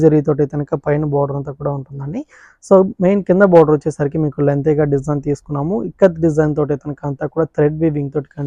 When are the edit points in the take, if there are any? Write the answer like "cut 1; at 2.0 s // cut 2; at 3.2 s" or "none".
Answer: none